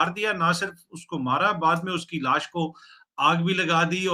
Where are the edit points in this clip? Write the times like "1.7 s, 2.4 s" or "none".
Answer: none